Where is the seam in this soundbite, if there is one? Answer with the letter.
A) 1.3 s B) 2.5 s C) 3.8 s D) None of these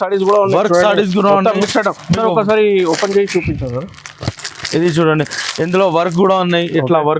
D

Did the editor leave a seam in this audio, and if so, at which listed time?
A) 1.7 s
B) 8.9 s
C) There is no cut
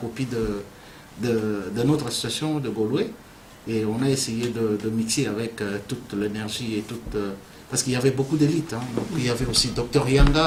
C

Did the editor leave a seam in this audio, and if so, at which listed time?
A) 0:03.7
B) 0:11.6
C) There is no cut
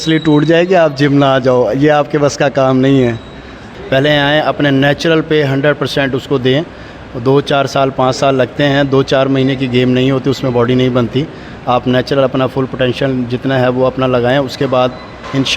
A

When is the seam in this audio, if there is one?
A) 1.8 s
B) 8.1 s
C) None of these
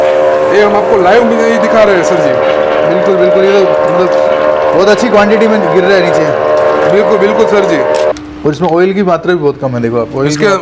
B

